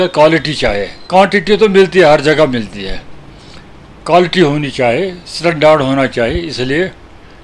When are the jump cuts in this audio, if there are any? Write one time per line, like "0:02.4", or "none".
0:01.0